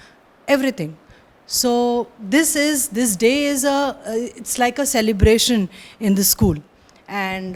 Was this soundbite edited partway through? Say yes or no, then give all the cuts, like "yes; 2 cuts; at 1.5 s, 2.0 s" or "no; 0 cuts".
no; 0 cuts